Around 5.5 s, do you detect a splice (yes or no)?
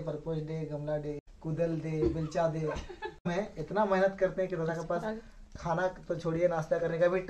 no